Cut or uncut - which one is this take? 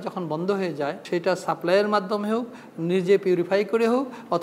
cut